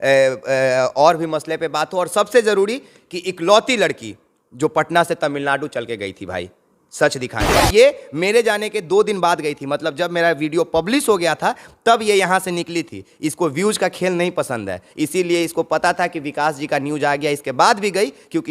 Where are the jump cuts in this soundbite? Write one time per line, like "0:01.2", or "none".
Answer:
0:07.6